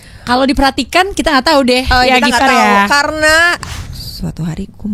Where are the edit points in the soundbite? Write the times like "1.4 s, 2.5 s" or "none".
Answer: 3.7 s